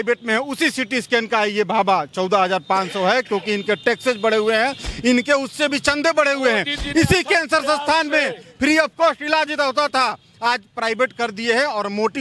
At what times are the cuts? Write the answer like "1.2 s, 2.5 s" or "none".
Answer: none